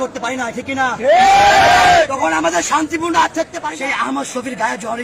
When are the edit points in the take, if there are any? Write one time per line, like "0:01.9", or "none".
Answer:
0:03.5